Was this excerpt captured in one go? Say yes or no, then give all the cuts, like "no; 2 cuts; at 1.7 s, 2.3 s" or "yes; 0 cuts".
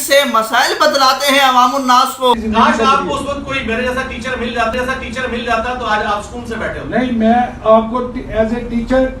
no; 3 cuts; at 2.3 s, 4.7 s, 7.0 s